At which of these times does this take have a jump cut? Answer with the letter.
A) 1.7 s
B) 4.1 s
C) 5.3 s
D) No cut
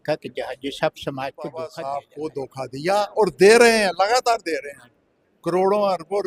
A